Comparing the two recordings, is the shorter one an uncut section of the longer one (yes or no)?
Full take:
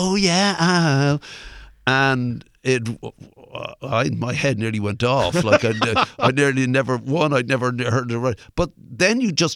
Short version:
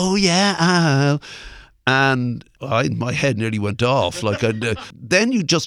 no